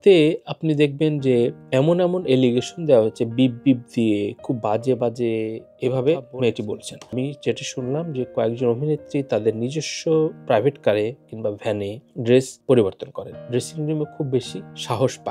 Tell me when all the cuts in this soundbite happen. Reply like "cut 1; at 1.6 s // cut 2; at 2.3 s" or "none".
cut 1; at 5.6 s // cut 2; at 7.1 s